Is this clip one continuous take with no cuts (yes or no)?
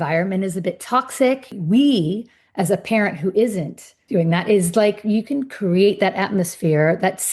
no